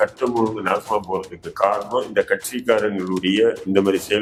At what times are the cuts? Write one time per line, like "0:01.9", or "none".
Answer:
none